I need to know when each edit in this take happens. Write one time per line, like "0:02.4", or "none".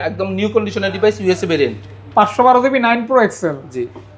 none